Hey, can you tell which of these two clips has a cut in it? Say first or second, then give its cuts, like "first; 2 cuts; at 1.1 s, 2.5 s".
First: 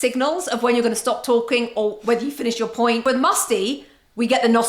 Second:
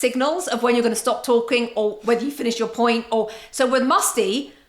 first; 1 cut; at 3.0 s